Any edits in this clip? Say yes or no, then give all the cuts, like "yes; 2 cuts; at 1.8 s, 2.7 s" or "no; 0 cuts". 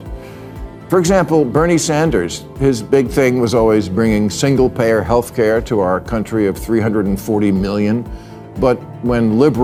no; 0 cuts